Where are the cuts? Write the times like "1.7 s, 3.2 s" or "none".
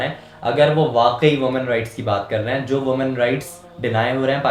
none